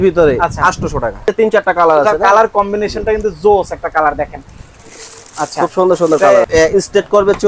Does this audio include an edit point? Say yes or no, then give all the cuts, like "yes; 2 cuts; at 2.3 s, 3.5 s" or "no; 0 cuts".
yes; 2 cuts; at 1.3 s, 6.5 s